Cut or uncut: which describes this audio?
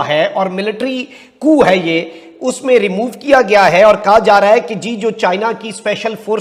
uncut